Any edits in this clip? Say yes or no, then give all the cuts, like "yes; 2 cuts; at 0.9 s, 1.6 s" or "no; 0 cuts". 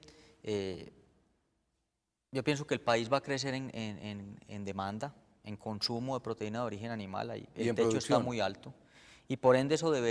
no; 0 cuts